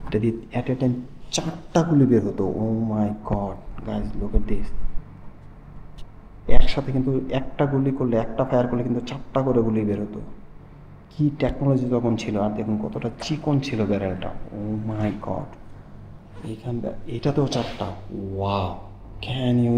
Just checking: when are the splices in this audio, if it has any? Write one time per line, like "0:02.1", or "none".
none